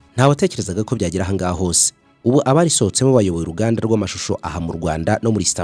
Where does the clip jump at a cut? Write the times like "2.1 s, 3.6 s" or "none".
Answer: none